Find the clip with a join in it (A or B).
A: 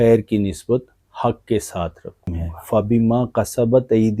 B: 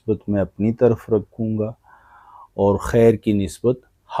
A